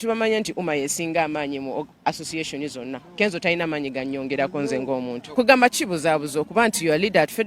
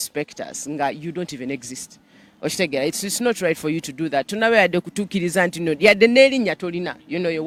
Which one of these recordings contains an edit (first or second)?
first